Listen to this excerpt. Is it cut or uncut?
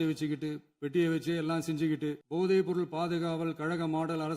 cut